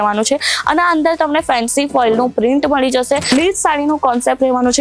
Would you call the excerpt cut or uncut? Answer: cut